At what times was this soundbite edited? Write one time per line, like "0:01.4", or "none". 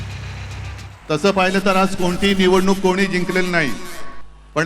0:00.9